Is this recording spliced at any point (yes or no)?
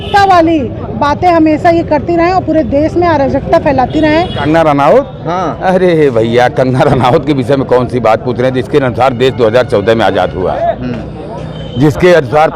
yes